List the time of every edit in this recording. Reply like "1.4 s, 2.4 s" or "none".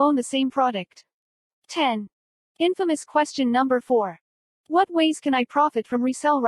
1.8 s, 3.2 s